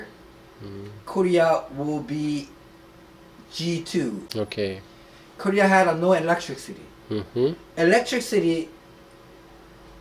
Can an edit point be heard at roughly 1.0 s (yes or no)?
no